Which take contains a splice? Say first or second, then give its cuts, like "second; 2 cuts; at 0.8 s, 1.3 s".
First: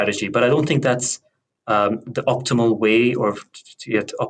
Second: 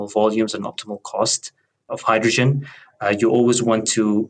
second; 1 cut; at 1.9 s